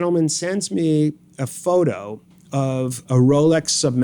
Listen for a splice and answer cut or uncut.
cut